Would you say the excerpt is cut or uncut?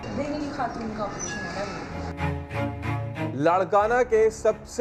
uncut